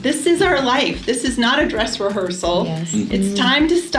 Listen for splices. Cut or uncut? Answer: uncut